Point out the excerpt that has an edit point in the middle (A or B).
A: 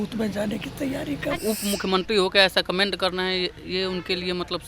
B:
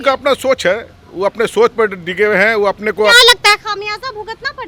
A